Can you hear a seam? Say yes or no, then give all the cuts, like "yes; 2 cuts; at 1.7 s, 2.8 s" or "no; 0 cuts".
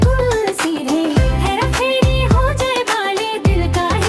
no; 0 cuts